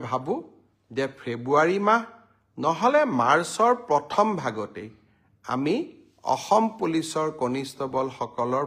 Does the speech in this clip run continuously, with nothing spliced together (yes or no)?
yes